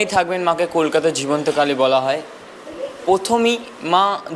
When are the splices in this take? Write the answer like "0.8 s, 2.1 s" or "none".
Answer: none